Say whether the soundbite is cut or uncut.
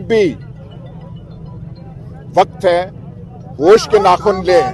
uncut